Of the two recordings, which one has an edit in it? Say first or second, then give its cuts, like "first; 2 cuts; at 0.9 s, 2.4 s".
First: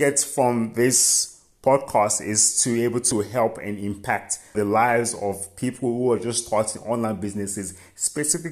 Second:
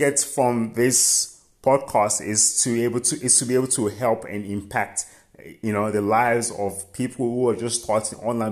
first; 2 cuts; at 3.1 s, 4.5 s